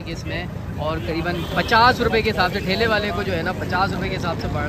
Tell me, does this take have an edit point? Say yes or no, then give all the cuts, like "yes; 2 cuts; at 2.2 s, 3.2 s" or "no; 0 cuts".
no; 0 cuts